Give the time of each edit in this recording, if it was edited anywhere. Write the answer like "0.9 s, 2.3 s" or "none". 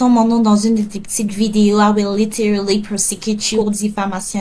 none